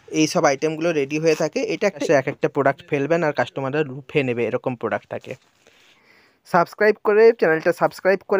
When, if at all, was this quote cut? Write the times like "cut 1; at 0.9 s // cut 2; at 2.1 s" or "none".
cut 1; at 2.0 s // cut 2; at 6.0 s